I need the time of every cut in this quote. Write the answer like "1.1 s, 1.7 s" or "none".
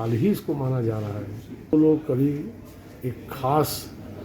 1.7 s